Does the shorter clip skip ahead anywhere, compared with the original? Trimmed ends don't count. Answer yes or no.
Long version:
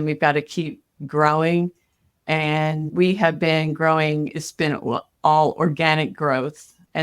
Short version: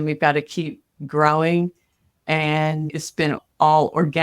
yes